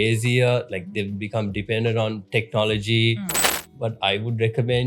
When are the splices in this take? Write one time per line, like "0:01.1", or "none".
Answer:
0:03.5